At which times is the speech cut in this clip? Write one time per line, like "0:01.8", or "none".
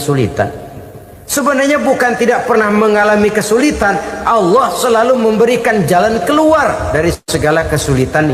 0:07.3